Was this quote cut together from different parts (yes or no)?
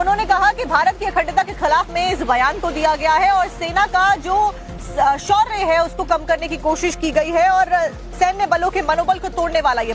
no